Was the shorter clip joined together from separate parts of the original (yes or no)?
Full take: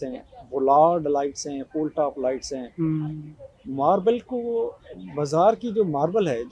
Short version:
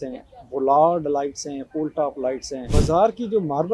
yes